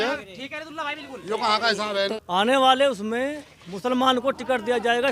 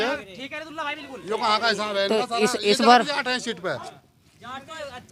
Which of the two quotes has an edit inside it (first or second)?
first